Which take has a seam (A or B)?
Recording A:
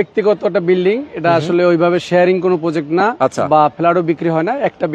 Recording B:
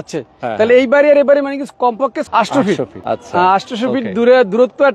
B